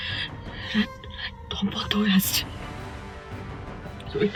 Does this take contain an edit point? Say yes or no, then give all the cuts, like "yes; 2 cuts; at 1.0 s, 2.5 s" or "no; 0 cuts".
no; 0 cuts